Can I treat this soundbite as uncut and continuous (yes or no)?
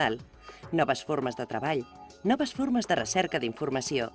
no